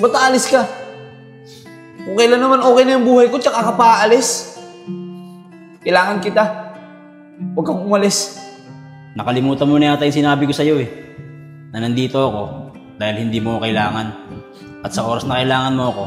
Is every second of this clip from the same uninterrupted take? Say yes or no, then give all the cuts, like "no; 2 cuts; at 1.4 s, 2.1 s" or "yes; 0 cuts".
no; 2 cuts; at 4.4 s, 5.7 s